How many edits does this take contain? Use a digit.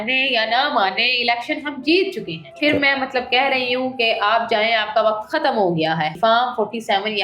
2